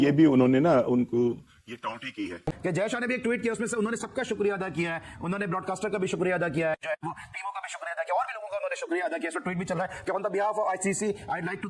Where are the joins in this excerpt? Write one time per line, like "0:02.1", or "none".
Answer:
0:02.3